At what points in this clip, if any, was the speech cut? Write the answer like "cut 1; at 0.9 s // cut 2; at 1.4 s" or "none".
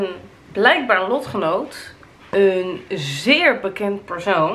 none